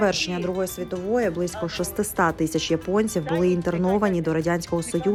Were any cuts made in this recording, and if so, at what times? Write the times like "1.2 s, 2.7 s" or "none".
none